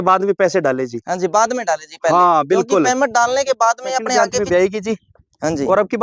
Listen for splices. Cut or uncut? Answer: cut